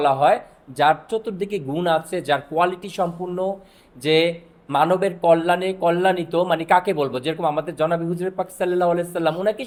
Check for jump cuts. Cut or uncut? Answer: uncut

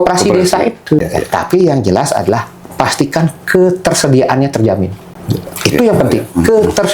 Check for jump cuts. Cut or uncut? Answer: cut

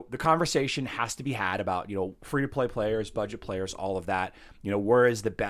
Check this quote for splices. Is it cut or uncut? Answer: uncut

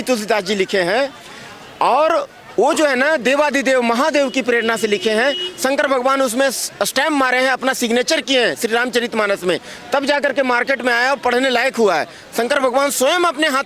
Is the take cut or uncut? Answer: uncut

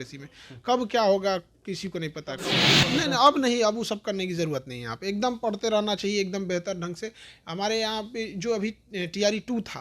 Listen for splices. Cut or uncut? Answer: cut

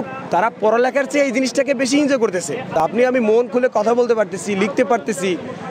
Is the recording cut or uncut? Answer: uncut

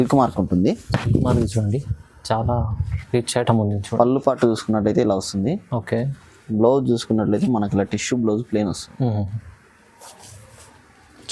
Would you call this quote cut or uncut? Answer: uncut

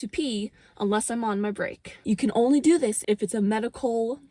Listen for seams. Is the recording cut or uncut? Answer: cut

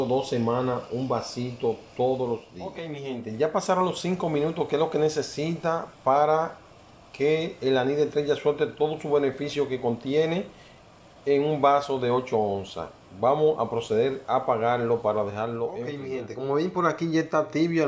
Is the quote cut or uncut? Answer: cut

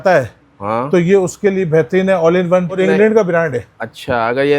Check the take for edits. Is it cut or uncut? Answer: cut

